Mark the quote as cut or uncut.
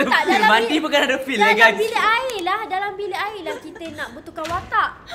uncut